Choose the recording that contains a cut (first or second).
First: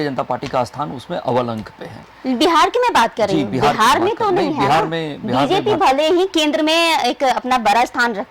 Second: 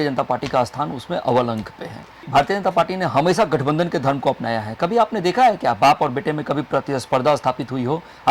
second